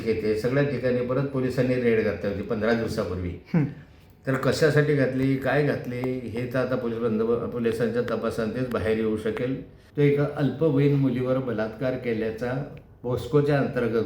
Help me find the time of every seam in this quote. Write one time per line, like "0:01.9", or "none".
0:09.8